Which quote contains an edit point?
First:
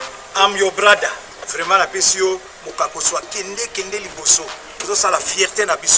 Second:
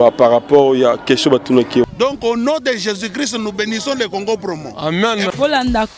second; 1 cut; at 1.9 s

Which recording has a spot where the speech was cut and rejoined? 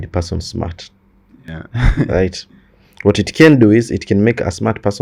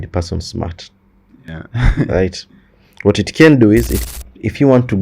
second; 1 cut; at 4.0 s

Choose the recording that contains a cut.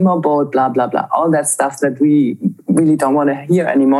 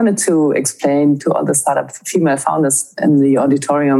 second; 2 cuts; at 1.2 s, 3.0 s

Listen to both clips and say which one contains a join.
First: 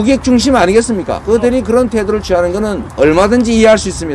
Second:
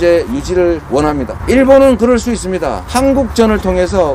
first; 1 cut; at 1.2 s

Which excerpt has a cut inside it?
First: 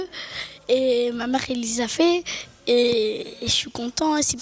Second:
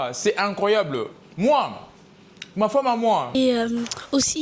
second; 1 cut; at 3.3 s

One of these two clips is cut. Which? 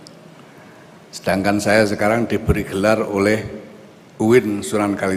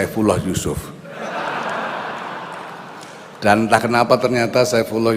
second; 1 cut; at 3.3 s

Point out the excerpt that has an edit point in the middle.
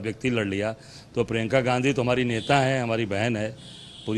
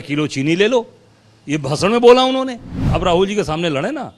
second; 1 cut; at 2.9 s

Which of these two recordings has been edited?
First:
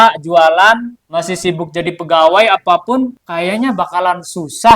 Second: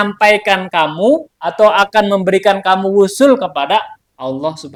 first; 2 cuts; at 1.0 s, 3.2 s

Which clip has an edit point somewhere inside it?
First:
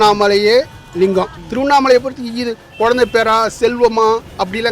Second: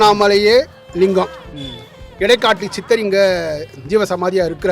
first; 1 cut; at 1.4 s

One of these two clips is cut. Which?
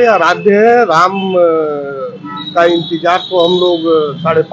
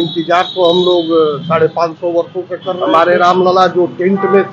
second; 1 cut; at 2.7 s

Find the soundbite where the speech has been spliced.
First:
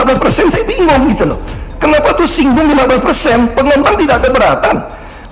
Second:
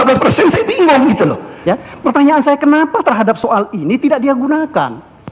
second; 1 cut; at 1.5 s

